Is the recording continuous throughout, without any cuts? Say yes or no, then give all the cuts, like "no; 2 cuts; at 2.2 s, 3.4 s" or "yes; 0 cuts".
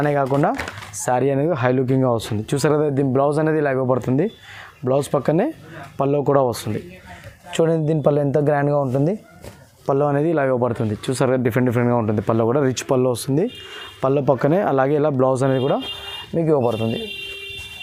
yes; 0 cuts